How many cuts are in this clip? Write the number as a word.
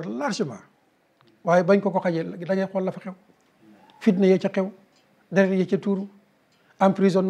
zero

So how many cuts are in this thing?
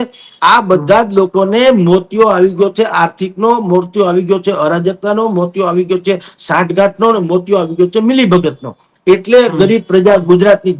zero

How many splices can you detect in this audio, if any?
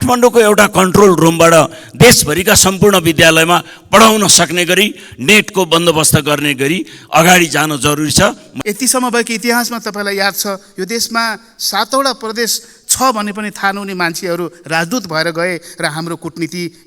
one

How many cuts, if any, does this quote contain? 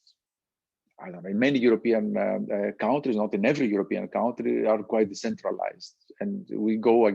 zero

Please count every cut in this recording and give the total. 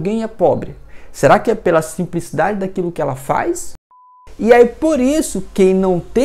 one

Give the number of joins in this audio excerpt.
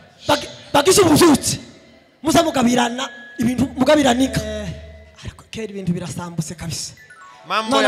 one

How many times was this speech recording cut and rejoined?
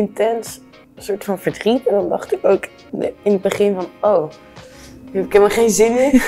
zero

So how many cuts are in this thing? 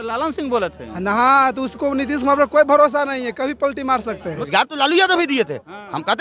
one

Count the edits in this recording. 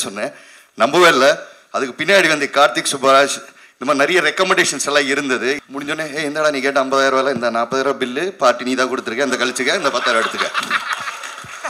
one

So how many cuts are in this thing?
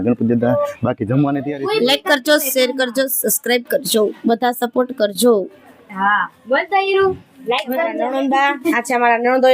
two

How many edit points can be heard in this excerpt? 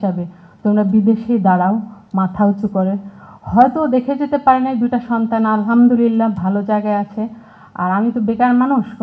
zero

